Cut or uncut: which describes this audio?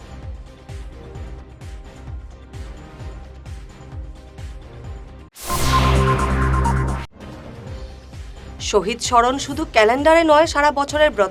uncut